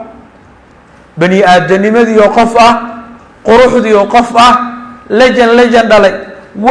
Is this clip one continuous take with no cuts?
yes; 0 cuts

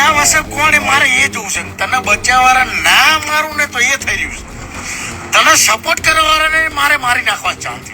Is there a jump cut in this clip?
no; 0 cuts

